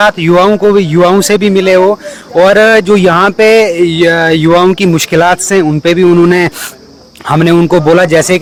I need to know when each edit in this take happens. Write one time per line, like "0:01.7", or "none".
none